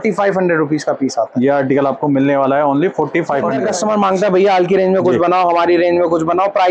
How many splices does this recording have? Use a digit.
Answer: 1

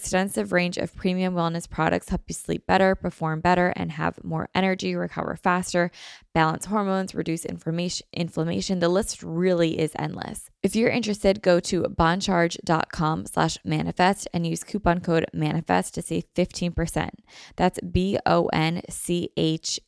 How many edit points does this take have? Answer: 1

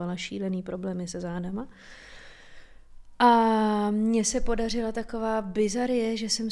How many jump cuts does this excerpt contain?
0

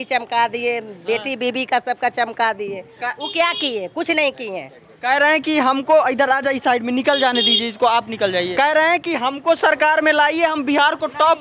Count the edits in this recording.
0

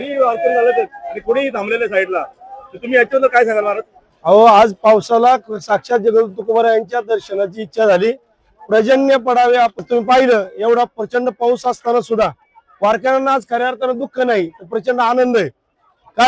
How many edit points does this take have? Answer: 1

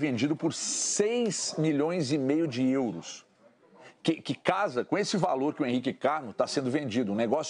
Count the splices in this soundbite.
0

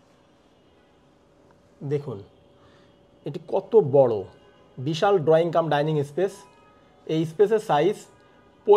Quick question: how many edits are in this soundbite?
0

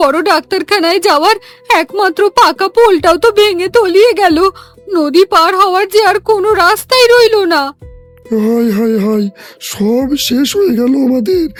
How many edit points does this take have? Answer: 0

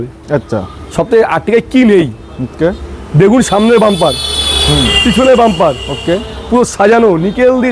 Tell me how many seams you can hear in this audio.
0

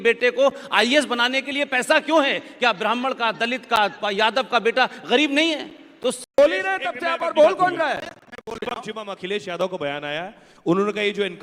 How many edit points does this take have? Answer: 1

